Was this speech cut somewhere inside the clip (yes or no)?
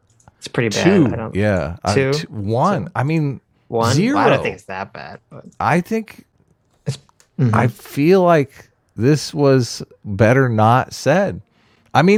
no